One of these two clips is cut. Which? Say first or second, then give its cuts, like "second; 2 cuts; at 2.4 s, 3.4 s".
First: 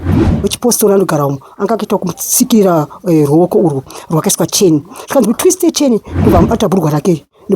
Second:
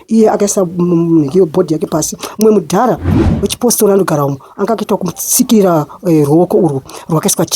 first; 1 cut; at 6.1 s